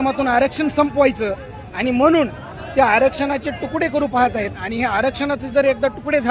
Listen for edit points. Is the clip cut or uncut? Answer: uncut